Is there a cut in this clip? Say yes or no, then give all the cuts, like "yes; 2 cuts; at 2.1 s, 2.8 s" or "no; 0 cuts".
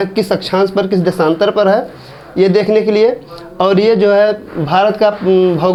no; 0 cuts